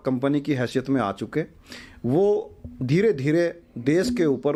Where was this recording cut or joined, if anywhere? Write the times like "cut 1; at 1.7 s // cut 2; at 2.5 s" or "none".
none